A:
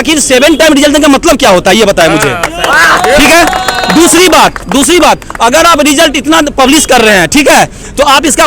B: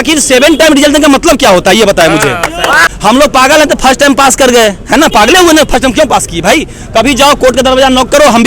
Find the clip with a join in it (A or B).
B